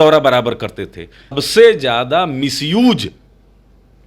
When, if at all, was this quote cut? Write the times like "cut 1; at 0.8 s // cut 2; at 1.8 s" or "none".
cut 1; at 1.4 s